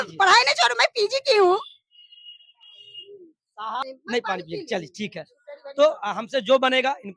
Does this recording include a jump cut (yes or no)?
yes